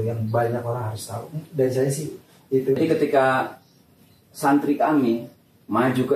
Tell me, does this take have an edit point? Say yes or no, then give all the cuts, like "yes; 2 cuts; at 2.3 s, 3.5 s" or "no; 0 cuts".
yes; 1 cut; at 2.8 s